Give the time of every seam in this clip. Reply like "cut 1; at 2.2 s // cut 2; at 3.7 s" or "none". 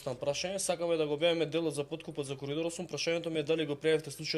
none